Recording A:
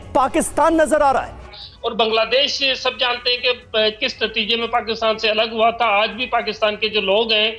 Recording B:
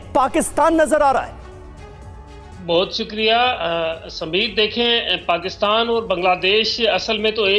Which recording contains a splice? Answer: A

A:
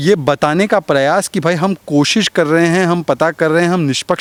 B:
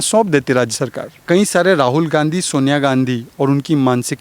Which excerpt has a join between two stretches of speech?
B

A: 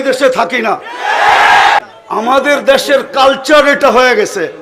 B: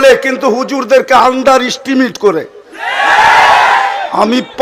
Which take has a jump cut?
A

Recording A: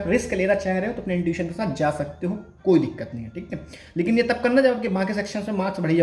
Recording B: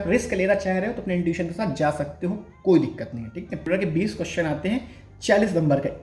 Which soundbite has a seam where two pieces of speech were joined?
B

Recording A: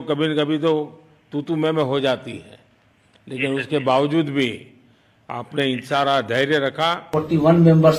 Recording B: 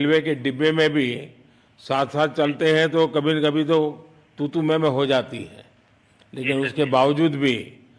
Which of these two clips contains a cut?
A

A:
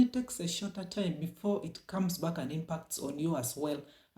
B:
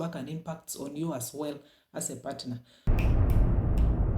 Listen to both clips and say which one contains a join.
B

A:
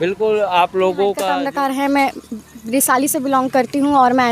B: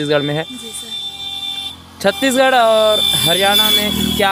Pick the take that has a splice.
A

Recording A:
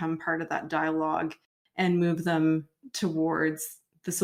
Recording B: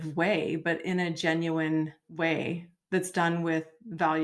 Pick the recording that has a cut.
B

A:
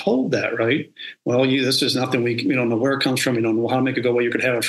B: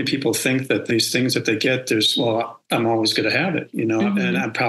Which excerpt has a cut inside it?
B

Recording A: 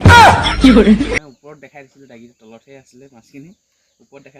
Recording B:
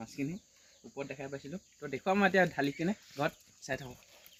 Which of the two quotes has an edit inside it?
A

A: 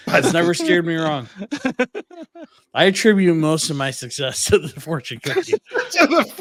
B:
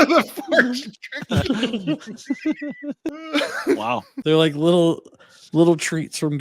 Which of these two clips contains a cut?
B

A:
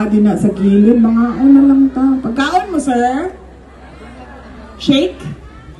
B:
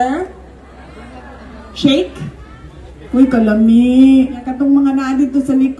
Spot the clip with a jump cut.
B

